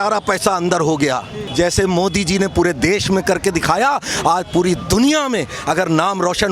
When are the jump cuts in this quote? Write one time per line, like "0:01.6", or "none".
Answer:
0:01.4